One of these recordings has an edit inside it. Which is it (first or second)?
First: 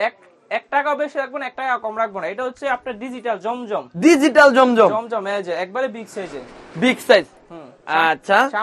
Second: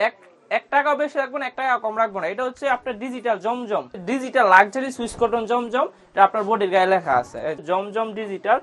second